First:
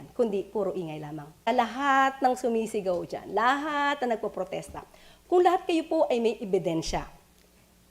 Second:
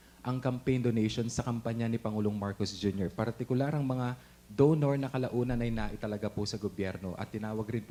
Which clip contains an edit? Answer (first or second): first